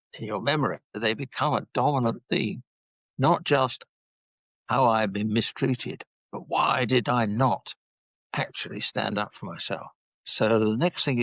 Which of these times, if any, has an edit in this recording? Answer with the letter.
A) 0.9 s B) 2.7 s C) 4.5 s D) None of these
A